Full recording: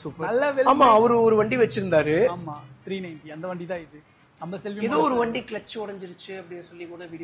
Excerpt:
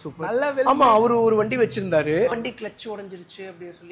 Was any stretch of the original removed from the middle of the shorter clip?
yes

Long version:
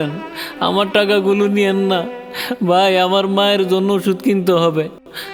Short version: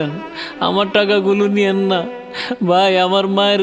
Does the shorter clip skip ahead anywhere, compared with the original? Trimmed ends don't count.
no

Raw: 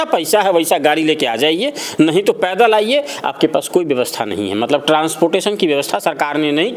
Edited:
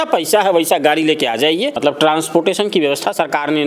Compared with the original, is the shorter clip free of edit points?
no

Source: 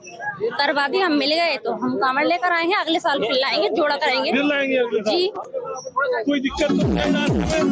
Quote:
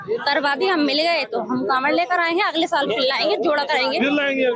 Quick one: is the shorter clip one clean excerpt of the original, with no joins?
yes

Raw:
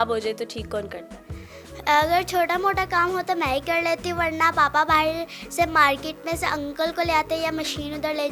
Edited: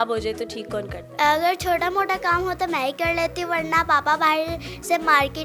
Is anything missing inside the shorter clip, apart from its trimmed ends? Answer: yes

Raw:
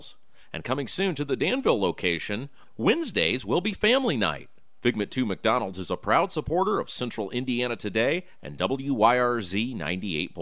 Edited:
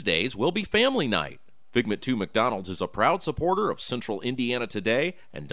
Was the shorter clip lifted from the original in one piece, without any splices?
yes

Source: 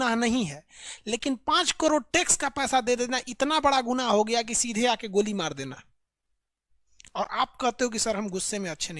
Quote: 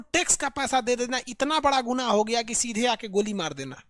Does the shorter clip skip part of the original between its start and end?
no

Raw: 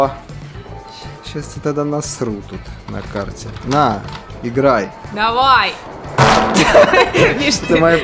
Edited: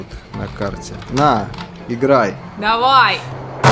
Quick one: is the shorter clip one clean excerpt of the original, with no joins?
yes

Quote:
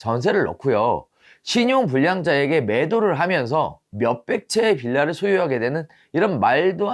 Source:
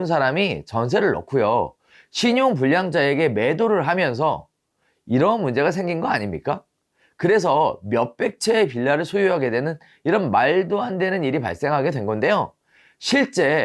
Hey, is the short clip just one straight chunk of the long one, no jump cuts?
no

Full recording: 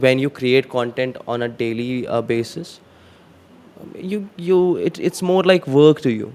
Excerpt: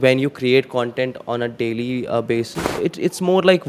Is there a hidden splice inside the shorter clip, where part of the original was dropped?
yes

